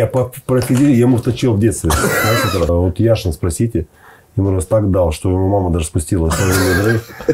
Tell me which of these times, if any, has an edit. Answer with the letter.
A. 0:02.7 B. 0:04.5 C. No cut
A